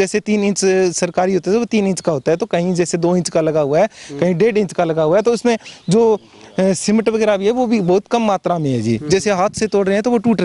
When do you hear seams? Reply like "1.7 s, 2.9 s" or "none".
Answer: none